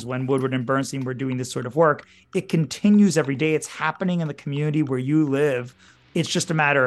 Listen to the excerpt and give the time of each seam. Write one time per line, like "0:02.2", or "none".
0:05.9